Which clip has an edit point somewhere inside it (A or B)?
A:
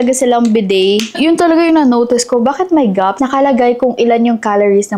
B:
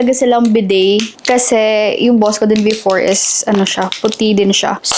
A